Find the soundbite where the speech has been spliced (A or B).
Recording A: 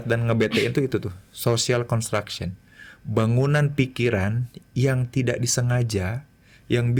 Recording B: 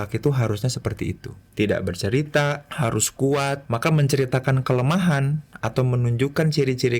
B